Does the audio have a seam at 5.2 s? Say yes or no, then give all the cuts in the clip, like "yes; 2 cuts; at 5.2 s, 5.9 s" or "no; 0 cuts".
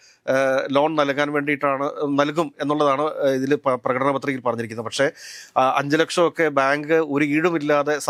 no; 0 cuts